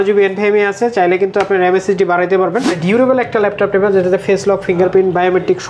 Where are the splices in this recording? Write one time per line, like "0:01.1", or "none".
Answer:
0:02.8